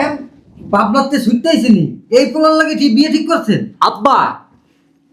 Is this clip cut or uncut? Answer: uncut